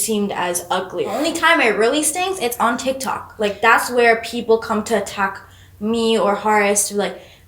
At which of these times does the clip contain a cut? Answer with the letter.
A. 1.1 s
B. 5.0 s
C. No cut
A